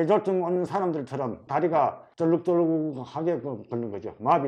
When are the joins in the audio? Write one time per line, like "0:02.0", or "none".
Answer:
none